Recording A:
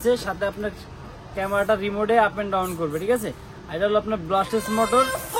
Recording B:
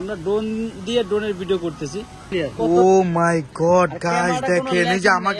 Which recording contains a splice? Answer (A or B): B